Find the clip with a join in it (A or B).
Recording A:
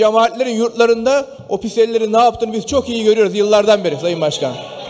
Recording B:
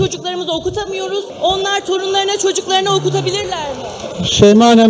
B